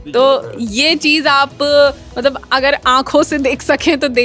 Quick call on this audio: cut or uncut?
uncut